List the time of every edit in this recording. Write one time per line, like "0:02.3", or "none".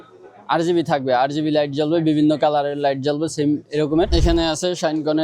0:04.1